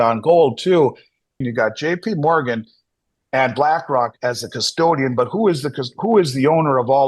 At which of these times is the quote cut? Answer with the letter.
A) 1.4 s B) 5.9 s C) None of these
A